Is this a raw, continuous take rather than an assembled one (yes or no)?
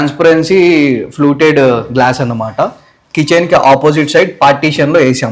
yes